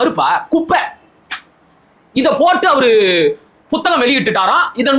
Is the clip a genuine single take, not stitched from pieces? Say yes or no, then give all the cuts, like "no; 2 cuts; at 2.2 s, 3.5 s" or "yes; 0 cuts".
yes; 0 cuts